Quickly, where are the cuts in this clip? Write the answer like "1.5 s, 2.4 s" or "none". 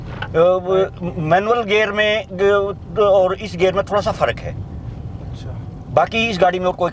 none